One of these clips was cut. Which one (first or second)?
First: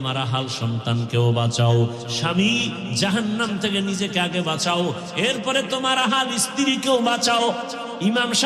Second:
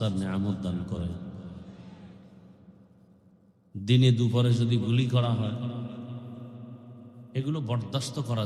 second